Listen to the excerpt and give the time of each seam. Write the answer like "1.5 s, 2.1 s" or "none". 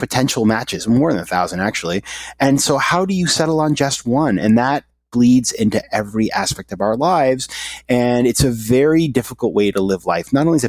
none